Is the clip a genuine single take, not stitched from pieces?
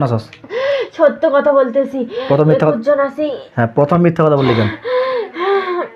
yes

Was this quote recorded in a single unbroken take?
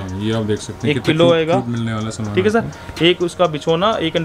yes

